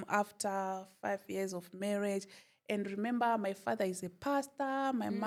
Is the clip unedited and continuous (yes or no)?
yes